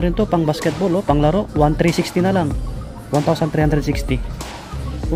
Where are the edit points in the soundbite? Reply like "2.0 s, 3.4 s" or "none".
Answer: none